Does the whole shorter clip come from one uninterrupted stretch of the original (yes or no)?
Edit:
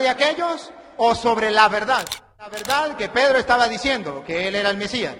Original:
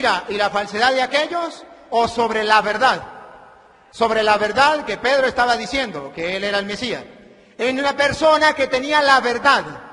no